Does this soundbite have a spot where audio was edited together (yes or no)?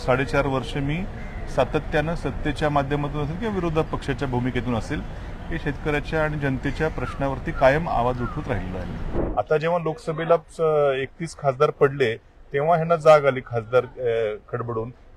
yes